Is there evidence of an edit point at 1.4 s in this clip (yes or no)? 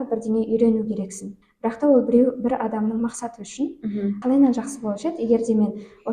yes